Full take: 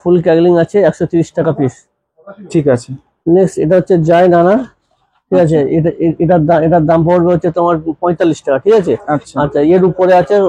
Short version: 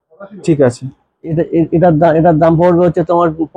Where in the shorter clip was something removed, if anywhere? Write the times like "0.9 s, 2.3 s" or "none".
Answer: 1.2 s